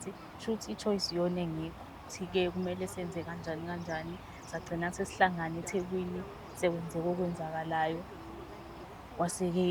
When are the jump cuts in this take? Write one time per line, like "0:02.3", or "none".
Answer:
0:02.1